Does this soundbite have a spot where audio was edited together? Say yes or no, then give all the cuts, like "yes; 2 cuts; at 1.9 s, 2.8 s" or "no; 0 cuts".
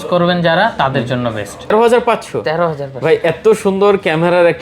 yes; 1 cut; at 1.7 s